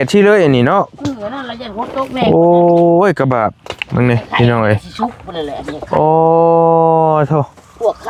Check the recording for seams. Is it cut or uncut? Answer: uncut